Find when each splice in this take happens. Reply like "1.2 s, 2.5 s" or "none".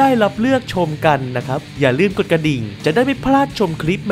1.6 s, 2.7 s